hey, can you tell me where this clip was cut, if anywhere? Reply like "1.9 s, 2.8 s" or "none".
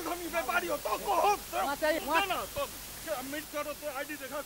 2.0 s, 3.4 s